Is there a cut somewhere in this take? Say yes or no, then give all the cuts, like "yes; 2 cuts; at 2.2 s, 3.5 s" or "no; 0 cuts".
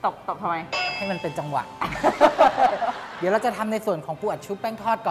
yes; 1 cut; at 3.0 s